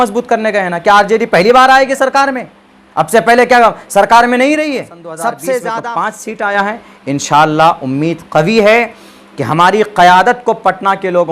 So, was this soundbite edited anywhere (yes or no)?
yes